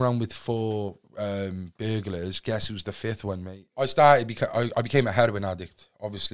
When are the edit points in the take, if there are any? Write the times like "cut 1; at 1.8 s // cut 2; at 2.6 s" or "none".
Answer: cut 1; at 3.6 s